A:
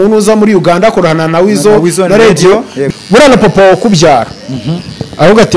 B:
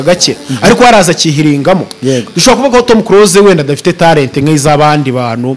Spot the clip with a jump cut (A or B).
A